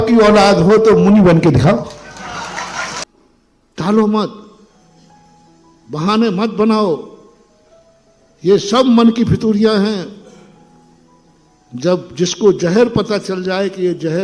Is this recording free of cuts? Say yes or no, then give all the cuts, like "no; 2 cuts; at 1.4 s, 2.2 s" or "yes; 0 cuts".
no; 1 cut; at 3.0 s